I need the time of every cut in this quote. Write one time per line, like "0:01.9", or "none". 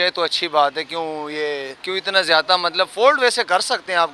0:01.7